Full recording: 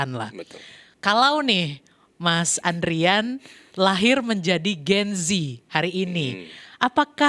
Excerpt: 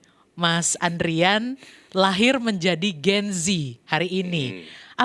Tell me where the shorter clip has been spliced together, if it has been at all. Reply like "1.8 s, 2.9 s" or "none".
none